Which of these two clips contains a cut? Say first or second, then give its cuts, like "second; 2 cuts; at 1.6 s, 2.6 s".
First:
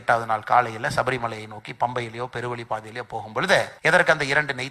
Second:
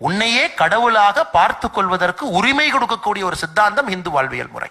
first; 1 cut; at 3.7 s